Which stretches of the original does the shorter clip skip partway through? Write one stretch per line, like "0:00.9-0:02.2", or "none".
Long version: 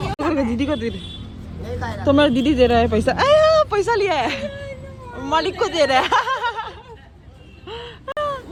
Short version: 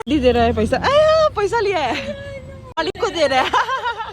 0:05.1-0:05.3